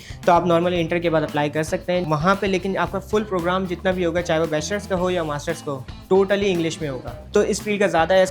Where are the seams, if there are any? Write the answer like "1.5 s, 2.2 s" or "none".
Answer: 2.0 s, 7.1 s